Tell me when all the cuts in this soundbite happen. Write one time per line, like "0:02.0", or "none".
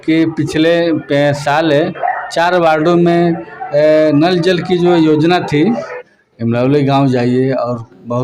0:05.9

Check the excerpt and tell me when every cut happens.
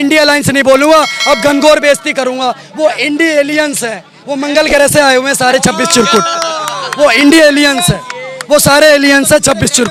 none

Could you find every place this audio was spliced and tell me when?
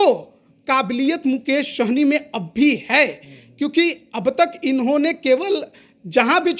none

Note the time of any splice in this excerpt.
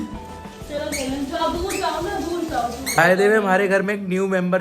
0:03.0

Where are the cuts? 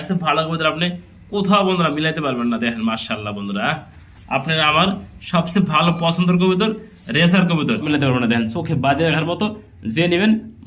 0:07.8

